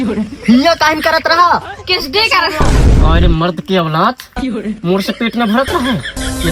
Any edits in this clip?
no; 0 cuts

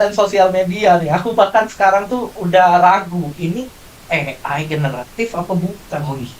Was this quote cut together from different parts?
no; 0 cuts

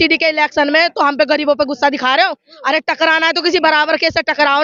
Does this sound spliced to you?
no; 0 cuts

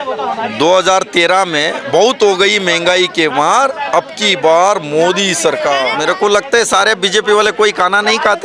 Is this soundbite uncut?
no; 1 cut; at 5.9 s

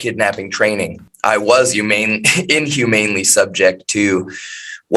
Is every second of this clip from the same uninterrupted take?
no; 1 cut; at 1.1 s

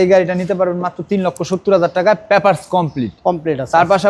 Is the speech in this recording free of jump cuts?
yes; 0 cuts

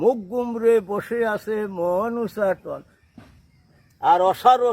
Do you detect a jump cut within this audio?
yes; 1 cut; at 2.9 s

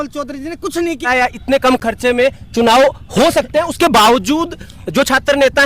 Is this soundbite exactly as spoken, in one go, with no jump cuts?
no; 1 cut; at 1.0 s

